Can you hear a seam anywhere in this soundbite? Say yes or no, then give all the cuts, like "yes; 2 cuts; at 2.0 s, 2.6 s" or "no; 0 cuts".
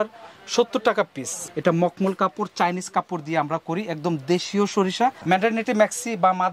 yes; 2 cuts; at 1.4 s, 5.2 s